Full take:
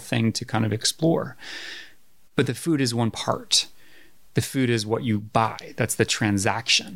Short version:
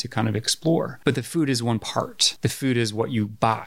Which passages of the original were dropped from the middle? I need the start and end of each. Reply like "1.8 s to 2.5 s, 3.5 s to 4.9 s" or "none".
1.3 s to 2.3 s, 3.5 s to 4.2 s